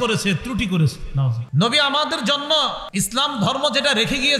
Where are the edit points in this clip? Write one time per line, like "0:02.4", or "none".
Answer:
0:01.4
0:02.8